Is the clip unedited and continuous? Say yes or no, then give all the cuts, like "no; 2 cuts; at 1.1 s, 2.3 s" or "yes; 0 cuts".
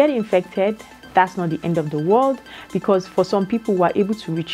yes; 0 cuts